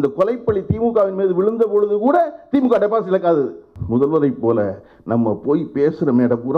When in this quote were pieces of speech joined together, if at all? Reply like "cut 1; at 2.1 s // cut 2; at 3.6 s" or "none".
cut 1; at 3.7 s